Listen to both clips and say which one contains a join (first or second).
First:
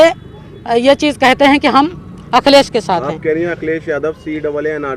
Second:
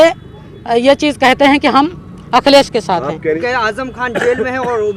second